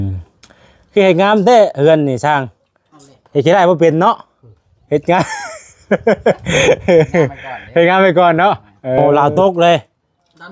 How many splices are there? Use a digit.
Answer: 1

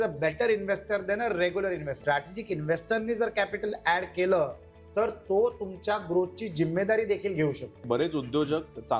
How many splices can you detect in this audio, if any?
2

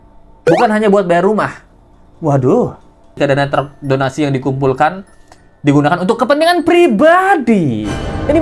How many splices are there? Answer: 1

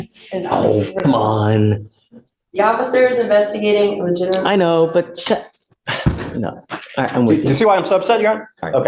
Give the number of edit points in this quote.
0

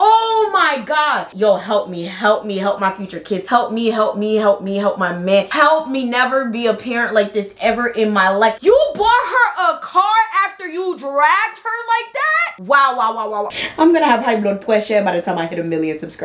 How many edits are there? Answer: 1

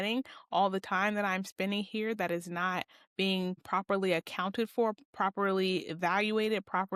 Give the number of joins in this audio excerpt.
0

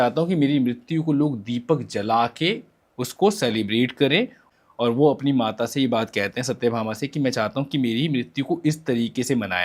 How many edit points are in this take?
0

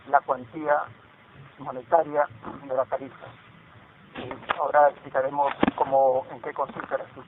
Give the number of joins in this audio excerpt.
0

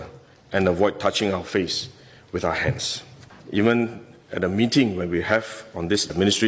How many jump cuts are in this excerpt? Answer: 1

